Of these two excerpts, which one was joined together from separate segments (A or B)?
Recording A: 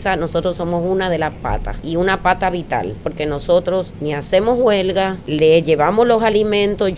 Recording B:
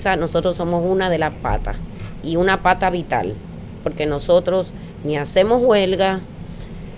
A